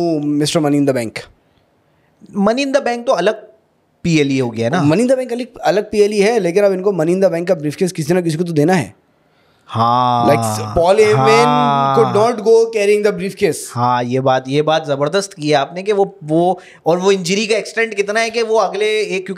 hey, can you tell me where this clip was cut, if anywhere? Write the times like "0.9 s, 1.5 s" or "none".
none